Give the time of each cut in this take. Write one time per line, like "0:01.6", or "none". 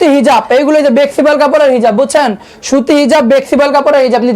none